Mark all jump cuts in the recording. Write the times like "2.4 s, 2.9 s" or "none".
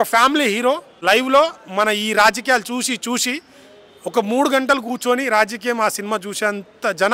0.9 s